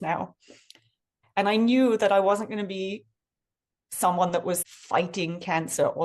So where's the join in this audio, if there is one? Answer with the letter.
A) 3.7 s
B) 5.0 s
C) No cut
C